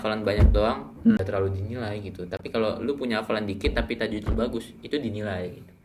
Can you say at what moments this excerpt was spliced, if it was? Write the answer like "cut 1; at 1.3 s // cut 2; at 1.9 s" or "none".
cut 1; at 1.2 s